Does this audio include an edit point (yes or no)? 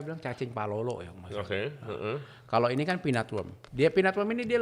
yes